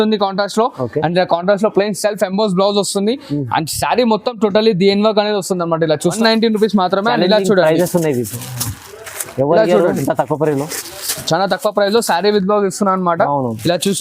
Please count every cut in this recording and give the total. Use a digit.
1